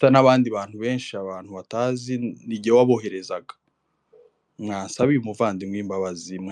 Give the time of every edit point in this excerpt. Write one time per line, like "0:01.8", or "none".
none